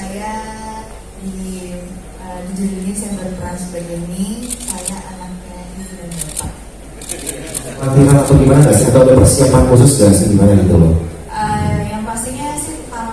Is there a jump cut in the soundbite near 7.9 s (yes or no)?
yes